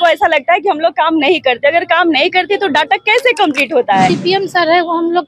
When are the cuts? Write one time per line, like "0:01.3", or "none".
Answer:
0:04.1